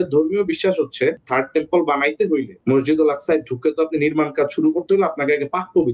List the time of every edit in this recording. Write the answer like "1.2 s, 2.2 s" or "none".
1.2 s, 2.5 s